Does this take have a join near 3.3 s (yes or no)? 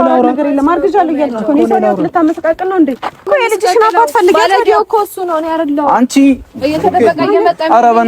yes